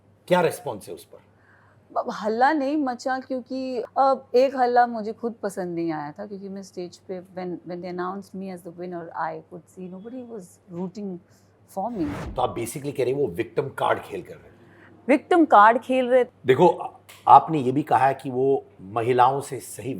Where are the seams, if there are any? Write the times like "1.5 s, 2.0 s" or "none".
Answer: 3.7 s, 12.2 s, 16.3 s